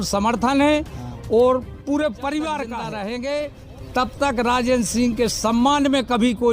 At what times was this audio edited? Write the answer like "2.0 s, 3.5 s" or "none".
2.9 s

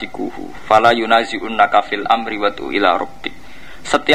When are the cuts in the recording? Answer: none

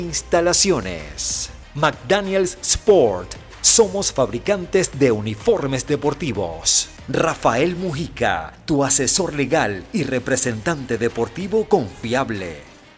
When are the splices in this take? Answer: none

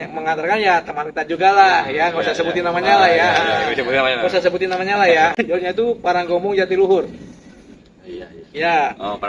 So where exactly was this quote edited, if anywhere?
5.3 s

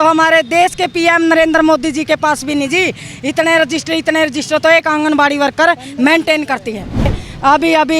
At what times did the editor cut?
7.1 s

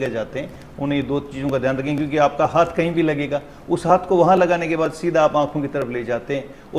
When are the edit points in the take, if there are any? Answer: none

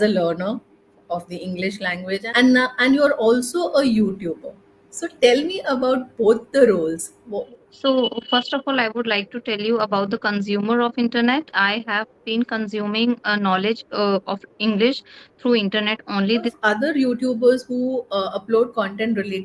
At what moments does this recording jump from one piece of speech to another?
2.2 s, 7.3 s, 16.5 s

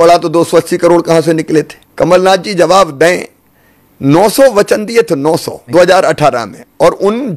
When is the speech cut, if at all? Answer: 1.8 s, 5.6 s

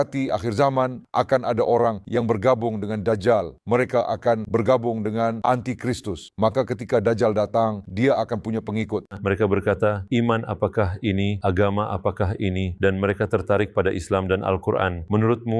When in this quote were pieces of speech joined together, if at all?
9.1 s

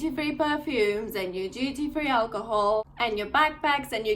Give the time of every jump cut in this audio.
2.9 s

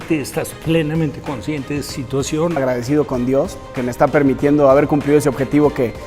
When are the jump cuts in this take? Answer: 2.6 s

